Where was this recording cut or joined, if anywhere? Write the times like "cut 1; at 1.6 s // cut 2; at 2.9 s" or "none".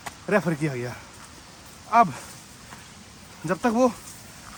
none

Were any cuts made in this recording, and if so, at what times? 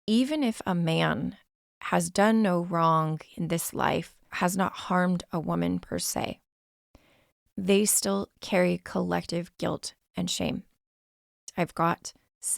cut 1; at 4.2 s // cut 2; at 11.5 s

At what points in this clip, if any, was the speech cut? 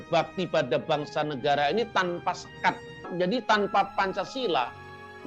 cut 1; at 3.1 s

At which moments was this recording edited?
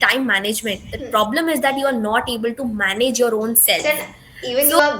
cut 1; at 3.8 s

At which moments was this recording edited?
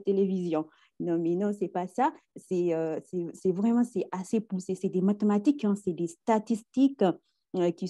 none

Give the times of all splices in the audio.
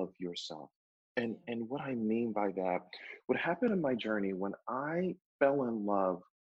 cut 1; at 5.2 s

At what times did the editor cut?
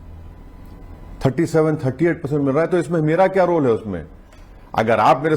none

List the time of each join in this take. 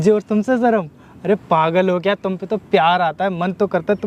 none

